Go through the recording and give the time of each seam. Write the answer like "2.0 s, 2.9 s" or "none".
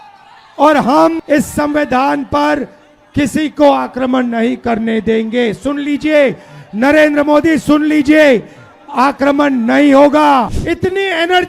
1.2 s, 10.6 s